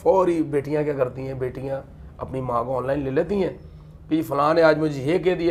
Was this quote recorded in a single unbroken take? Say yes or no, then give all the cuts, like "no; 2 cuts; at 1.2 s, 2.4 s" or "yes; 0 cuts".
yes; 0 cuts